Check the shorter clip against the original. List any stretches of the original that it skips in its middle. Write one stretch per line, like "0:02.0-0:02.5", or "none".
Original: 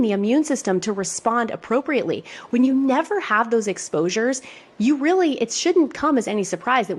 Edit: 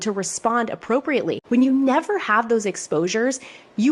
0:02.2-0:02.4